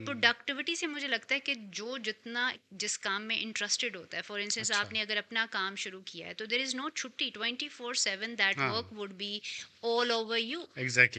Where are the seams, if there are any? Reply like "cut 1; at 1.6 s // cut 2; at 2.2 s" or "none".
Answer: none